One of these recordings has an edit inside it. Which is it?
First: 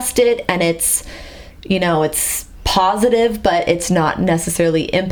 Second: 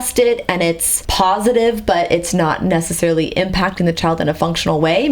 second; 1 cut; at 1.0 s

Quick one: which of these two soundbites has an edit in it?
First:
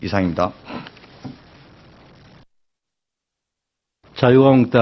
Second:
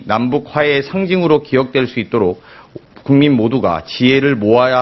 second; 1 cut; at 2.4 s

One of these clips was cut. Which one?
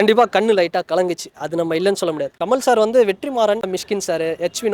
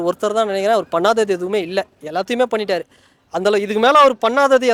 first; 2 cuts; at 2.3 s, 3.8 s

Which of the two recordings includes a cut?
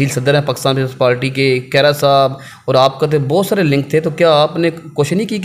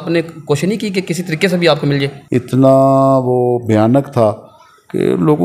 second; 1 cut; at 2.2 s

